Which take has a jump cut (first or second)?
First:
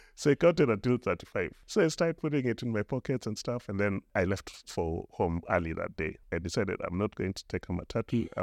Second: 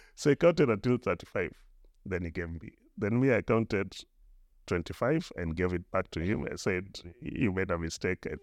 first